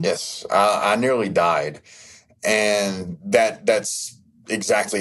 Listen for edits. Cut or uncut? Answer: uncut